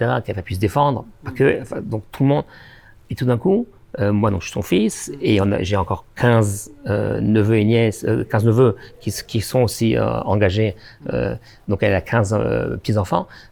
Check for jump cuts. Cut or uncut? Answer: uncut